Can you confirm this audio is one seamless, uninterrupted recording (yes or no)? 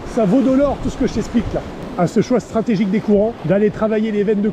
no